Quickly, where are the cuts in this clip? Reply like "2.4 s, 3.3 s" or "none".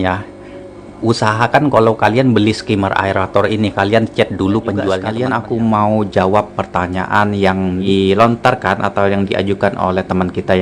5.1 s, 7.9 s